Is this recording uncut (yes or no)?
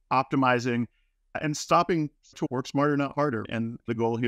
yes